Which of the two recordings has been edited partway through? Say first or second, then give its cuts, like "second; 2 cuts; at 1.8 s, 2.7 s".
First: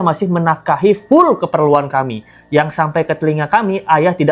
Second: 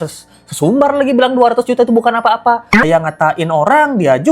second; 1 cut; at 2.8 s